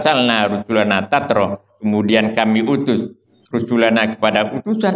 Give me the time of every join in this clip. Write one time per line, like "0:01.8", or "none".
none

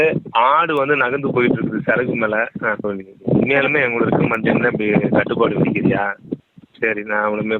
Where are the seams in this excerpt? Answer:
0:02.9
0:06.4

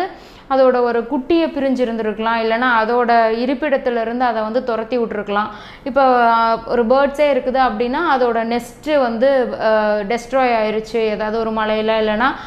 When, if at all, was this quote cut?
none

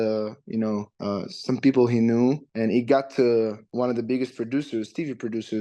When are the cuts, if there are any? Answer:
0:00.9
0:02.5
0:03.6

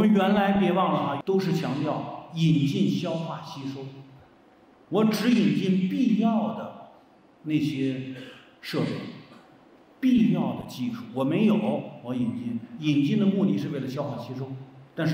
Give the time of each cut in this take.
0:01.2

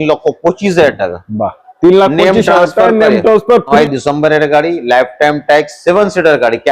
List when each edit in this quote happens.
0:03.7

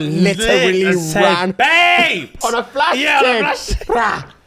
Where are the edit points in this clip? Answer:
0:02.3

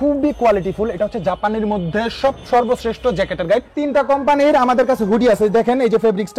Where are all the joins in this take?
0:03.7

